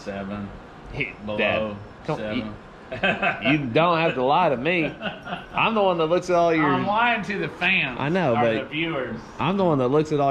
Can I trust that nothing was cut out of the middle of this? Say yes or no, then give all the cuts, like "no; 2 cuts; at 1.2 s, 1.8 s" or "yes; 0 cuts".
yes; 0 cuts